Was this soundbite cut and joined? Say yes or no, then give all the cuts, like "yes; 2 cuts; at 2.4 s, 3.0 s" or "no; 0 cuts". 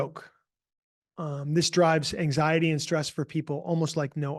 no; 0 cuts